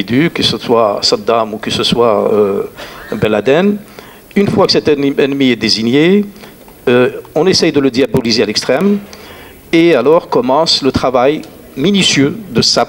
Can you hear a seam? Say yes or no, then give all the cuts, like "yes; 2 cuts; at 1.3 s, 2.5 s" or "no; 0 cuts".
no; 0 cuts